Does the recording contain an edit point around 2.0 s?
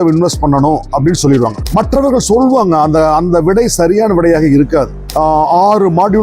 no; 1 cut; at 5.1 s

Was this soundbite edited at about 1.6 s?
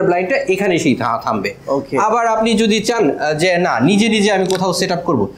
no; 0 cuts

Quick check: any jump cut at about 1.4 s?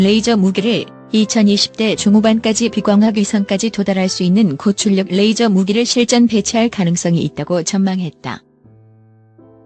no; 1 cut; at 8.4 s

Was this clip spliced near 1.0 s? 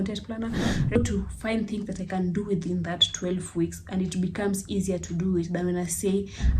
yes; 1 cut; at 1.0 s

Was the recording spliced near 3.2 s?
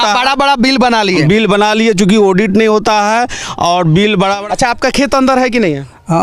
no; 1 cut; at 4.4 s

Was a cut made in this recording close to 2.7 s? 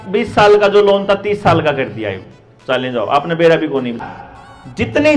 no; 1 cut; at 4.0 s

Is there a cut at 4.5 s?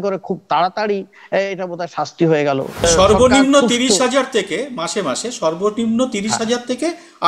no; 1 cut; at 2.8 s

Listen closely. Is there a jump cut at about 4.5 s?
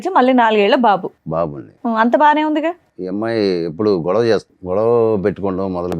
yes; 2 cuts; at 2.9 s, 4.5 s

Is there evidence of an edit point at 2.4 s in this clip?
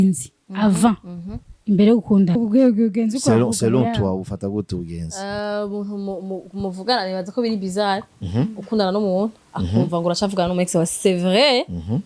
yes; 1 cut; at 2.4 s

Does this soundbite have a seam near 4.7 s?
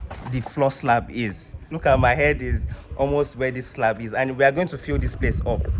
no; 1 cut; at 1.7 s

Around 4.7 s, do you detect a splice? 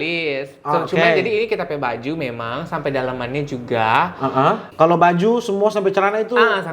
yes; 1 cut; at 4.7 s

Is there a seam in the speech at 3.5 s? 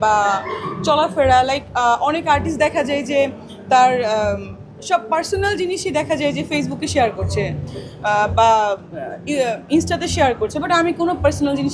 no; 0 cuts

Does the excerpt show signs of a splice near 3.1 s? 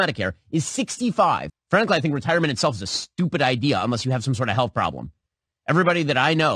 no; 1 cut; at 1.5 s

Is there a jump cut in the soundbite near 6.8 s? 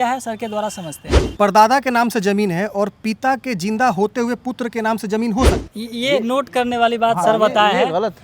no; 2 cuts; at 1.4 s, 5.5 s

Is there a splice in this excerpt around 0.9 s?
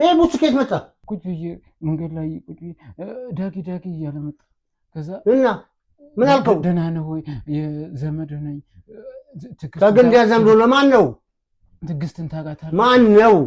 yes; 1 cut; at 0.9 s

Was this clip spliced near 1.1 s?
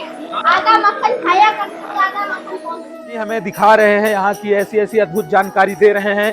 no; 1 cut; at 3.3 s

